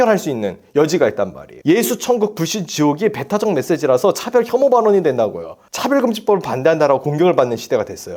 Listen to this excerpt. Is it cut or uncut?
cut